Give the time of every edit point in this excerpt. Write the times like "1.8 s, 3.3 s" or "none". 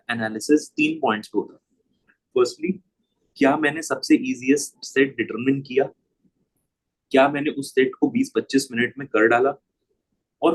none